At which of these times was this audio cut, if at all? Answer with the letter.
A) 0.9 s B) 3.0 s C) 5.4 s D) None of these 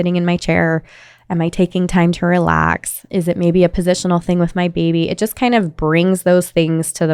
B